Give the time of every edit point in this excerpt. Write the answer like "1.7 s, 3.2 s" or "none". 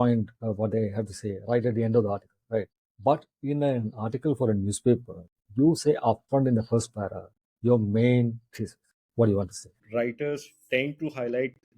2.8 s, 9.7 s

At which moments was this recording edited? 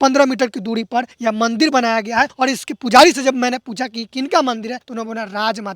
1.1 s, 2.3 s, 4.9 s

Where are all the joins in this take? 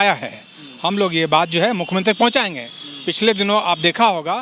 none

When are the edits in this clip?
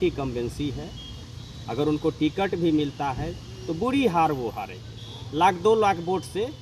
none

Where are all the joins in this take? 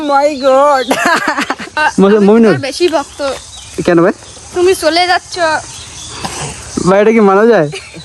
1.8 s

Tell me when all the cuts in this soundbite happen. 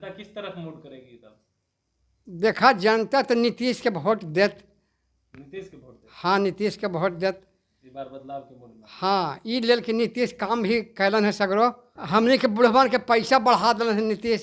11.9 s

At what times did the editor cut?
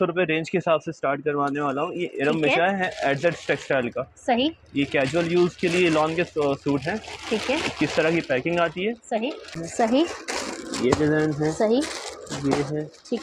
9.6 s

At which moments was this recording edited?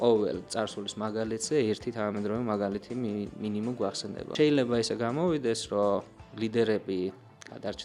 4.3 s

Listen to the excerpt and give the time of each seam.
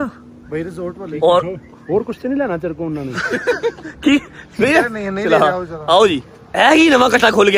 none

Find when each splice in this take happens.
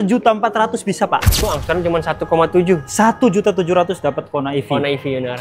1.4 s

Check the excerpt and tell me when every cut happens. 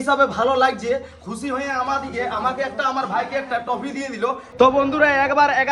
4.5 s

